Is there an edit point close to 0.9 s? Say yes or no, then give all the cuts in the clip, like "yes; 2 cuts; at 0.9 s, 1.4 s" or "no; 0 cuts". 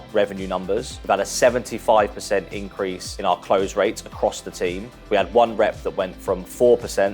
yes; 3 cuts; at 0.9 s, 3.1 s, 4.9 s